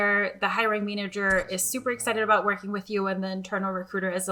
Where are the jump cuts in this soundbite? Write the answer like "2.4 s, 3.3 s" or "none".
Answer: none